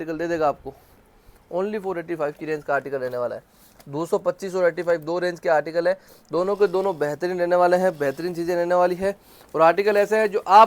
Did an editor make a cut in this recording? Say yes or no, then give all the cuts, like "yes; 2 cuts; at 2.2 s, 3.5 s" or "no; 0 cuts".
no; 0 cuts